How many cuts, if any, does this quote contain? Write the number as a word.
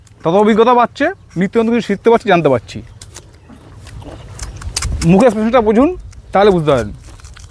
zero